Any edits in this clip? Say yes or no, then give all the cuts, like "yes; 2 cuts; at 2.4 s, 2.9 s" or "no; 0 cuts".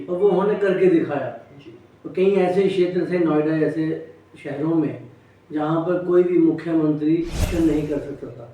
yes; 1 cut; at 7.5 s